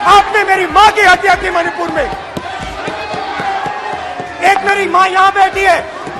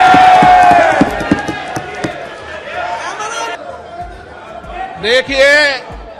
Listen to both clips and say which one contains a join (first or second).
second